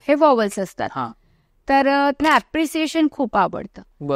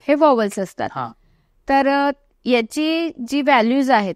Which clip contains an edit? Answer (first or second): first